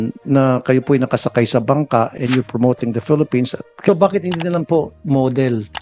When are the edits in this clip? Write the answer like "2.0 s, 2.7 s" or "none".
3.9 s